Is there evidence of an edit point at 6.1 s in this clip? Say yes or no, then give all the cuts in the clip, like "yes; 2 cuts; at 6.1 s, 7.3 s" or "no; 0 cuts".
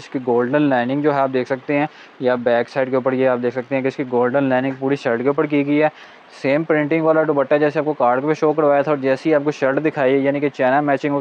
yes; 1 cut; at 6.1 s